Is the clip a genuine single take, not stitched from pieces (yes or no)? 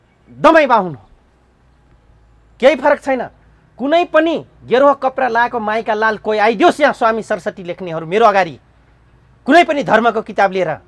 yes